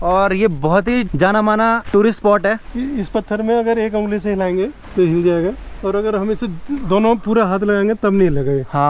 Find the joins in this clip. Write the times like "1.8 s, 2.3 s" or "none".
1.8 s, 2.6 s, 4.8 s, 5.8 s